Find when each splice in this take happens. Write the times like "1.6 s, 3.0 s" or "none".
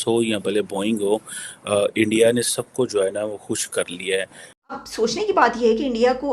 4.6 s